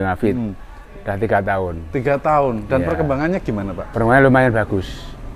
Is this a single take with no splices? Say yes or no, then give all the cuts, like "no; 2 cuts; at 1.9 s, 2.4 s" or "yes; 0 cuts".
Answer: yes; 0 cuts